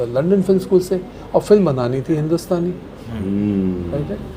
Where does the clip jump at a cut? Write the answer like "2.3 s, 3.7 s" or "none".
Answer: none